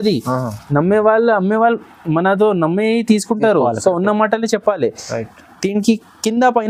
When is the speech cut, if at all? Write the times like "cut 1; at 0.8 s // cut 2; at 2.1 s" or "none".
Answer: none